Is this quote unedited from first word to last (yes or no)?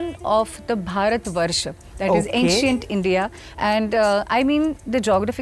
yes